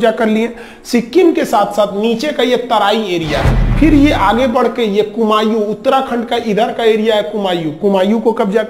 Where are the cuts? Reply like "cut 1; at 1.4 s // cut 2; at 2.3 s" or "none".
cut 1; at 3.5 s